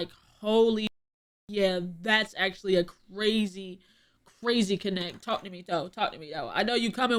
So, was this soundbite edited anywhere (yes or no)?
no